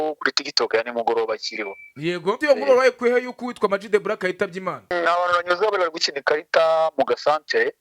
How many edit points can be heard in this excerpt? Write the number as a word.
two